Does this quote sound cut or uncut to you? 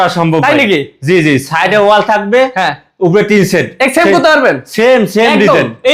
uncut